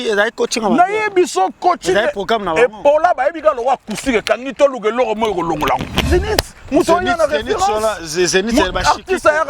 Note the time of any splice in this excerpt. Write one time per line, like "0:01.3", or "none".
0:06.1